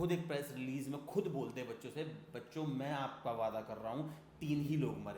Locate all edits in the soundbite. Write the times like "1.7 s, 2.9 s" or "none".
none

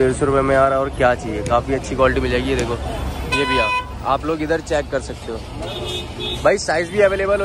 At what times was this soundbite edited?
none

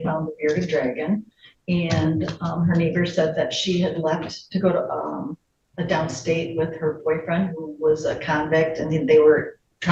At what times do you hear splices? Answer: none

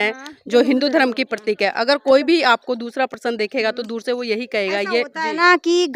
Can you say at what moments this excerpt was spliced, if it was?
none

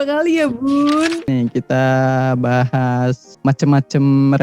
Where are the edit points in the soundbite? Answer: 1.3 s, 3.3 s

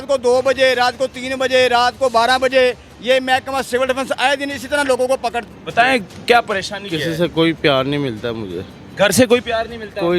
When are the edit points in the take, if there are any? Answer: 5.4 s

